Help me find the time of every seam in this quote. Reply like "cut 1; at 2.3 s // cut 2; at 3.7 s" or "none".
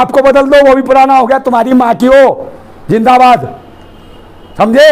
none